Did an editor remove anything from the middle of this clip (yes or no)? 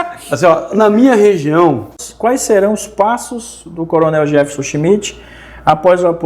yes